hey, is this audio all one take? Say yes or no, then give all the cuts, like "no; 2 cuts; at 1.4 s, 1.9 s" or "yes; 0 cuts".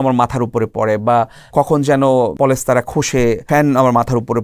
no; 3 cuts; at 1.5 s, 2.3 s, 3.4 s